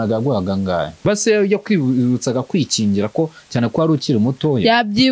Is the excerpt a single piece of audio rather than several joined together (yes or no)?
no